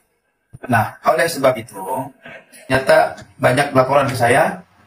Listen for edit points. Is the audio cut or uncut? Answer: cut